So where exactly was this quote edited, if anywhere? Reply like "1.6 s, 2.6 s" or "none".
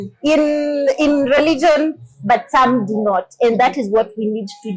none

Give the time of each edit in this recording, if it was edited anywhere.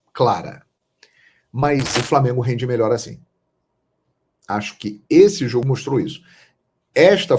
1.9 s, 5.6 s

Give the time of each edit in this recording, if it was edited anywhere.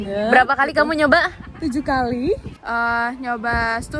2.5 s

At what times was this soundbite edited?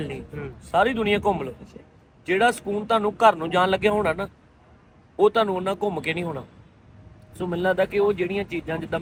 none

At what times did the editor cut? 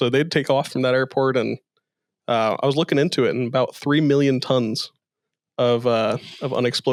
none

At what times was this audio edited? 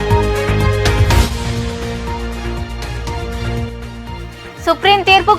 1.0 s

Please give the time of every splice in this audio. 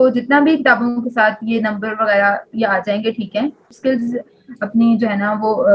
3.7 s

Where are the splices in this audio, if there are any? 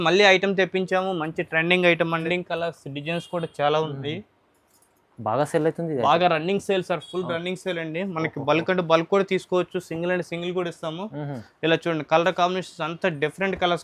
2.2 s

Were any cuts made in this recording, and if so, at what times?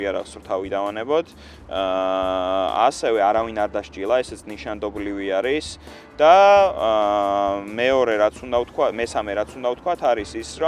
none

